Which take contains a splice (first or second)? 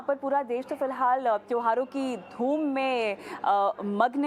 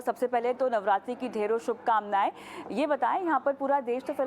second